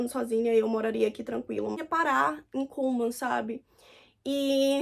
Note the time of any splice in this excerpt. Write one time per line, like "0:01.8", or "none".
0:01.7